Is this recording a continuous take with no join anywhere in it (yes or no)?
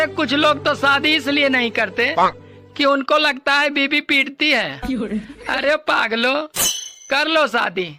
yes